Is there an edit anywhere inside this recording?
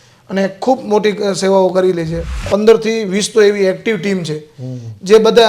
yes; 1 cut; at 2.5 s

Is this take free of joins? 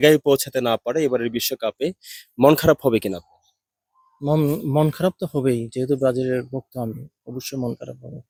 yes; 0 cuts

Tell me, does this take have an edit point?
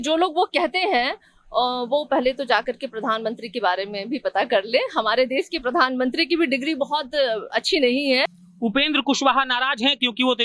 yes; 1 cut; at 8.4 s

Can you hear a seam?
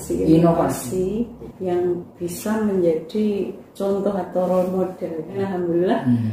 yes; 3 cuts; at 1.4 s, 3.6 s, 5.3 s

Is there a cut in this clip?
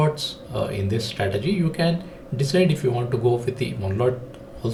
no; 0 cuts

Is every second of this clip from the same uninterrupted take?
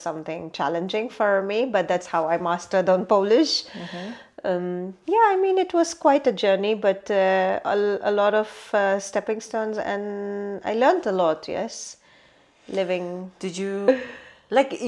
no; 1 cut; at 13.8 s

